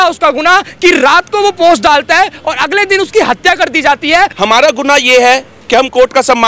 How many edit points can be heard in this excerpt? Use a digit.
1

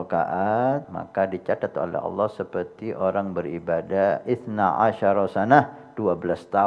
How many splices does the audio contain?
1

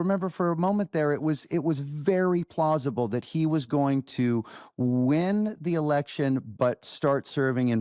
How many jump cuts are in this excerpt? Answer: 0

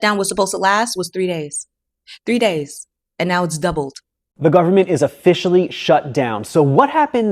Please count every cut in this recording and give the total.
1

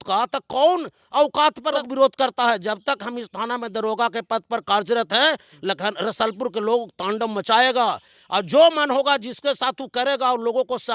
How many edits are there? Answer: 1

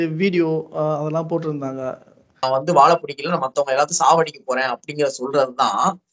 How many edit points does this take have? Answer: 1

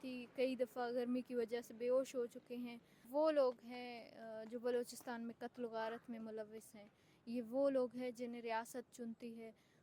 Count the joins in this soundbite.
1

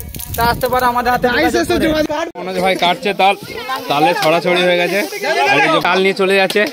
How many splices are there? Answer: 2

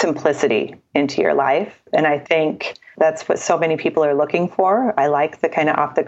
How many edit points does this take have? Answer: 1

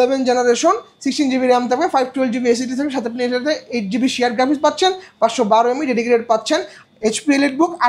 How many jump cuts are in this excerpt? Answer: 1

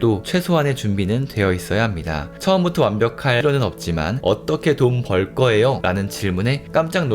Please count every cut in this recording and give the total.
2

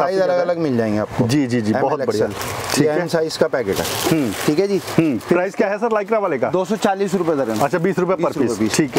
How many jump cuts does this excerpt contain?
0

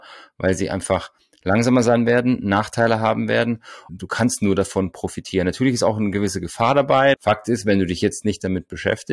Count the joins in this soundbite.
2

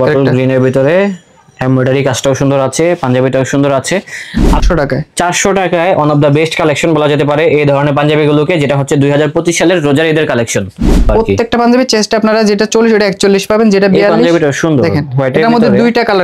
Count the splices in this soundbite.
2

